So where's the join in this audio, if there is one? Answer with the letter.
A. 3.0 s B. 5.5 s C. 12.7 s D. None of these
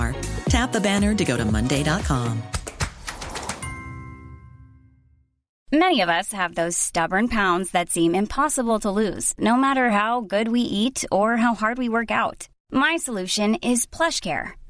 B